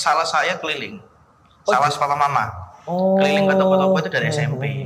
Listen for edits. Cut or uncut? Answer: uncut